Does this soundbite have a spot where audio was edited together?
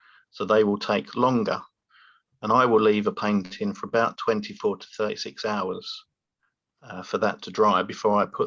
no; 0 cuts

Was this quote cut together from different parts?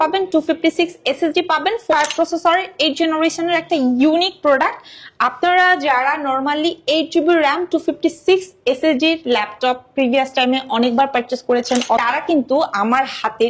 yes; 2 cuts; at 1.9 s, 12.0 s

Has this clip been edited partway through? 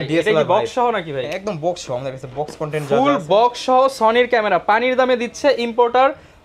no; 0 cuts

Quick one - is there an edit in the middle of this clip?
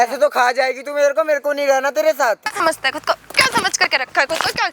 yes; 1 cut; at 2.5 s

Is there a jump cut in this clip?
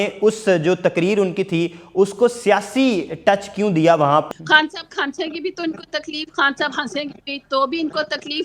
yes; 1 cut; at 4.3 s

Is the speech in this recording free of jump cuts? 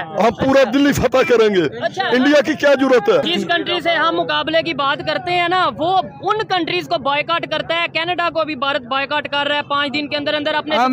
no; 1 cut; at 3.3 s

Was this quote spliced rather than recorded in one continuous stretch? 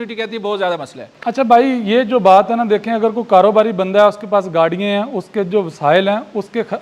no; 0 cuts

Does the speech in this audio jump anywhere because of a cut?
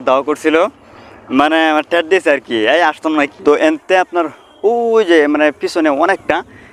yes; 1 cut; at 3.3 s

